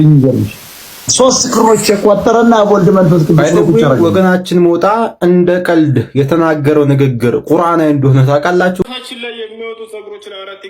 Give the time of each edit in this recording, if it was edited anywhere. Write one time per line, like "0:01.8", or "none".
0:08.8